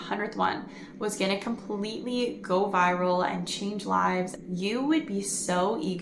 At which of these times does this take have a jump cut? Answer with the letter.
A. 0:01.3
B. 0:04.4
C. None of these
B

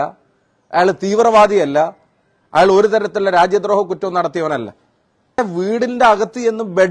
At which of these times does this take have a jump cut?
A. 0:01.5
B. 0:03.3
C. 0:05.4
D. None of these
C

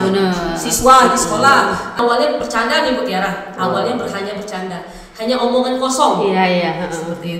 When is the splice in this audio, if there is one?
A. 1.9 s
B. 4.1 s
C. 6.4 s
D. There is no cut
A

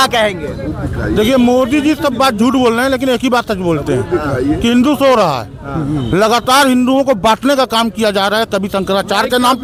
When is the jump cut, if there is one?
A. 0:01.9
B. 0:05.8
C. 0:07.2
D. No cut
D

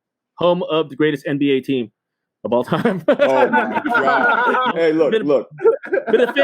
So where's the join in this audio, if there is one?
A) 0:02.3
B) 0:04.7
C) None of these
B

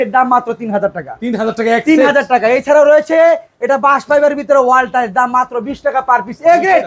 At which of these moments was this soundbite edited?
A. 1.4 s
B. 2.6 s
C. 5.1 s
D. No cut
D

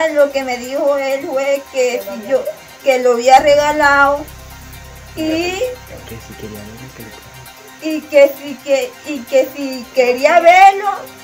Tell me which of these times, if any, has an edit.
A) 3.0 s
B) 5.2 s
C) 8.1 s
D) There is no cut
D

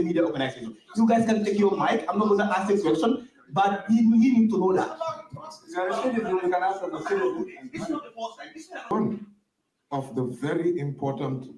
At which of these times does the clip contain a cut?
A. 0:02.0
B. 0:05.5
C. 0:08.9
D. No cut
C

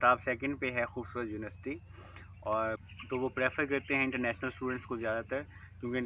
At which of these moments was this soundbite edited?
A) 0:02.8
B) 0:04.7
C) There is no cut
A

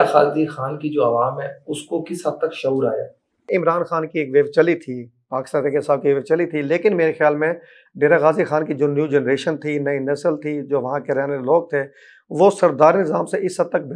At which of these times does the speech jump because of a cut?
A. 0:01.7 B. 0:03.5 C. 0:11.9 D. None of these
B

